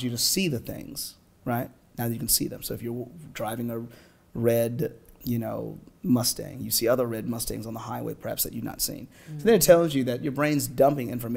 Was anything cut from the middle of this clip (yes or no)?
no